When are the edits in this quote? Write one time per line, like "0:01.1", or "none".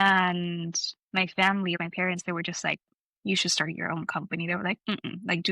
0:01.8